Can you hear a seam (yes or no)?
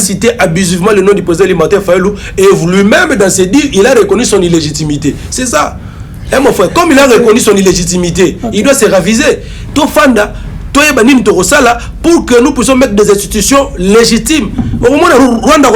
no